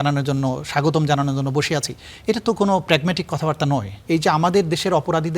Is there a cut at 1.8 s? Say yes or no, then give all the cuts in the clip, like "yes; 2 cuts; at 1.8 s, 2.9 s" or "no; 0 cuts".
no; 1 cut; at 3.9 s